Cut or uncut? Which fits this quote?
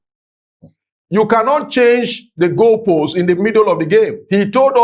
uncut